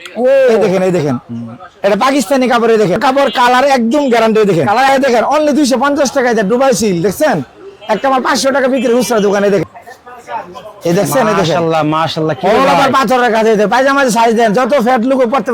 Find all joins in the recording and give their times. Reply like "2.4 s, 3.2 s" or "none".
3.0 s, 4.9 s, 9.6 s

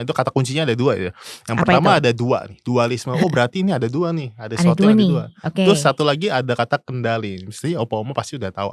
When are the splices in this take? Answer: none

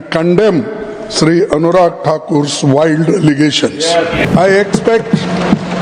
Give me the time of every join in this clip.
4.3 s

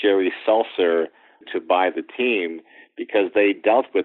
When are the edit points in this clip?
1.5 s

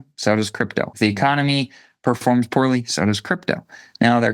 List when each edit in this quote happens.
0.9 s

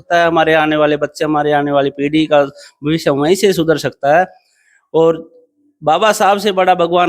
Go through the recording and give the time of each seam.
none

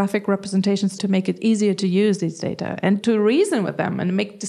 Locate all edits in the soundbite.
0.9 s, 3.0 s

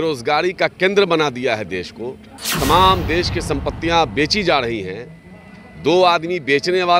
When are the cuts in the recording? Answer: none

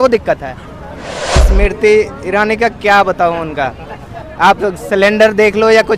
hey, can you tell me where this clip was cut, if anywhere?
1.3 s

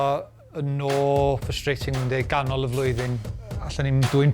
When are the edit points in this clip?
1.5 s, 3.3 s

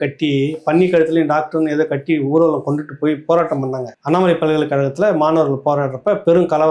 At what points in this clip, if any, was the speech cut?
3.9 s

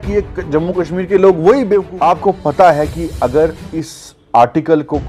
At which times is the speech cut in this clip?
1.9 s

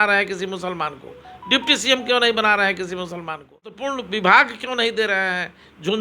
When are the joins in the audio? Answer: 3.8 s

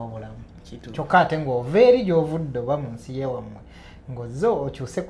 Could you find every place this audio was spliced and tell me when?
none

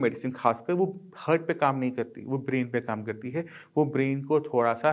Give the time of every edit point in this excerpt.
none

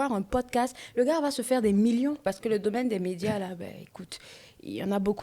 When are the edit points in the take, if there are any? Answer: 2.2 s

